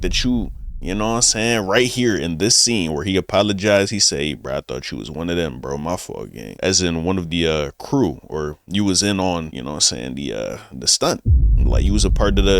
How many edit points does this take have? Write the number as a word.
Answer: zero